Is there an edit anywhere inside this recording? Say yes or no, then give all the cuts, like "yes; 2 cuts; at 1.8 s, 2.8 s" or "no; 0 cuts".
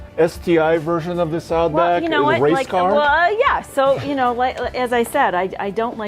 no; 0 cuts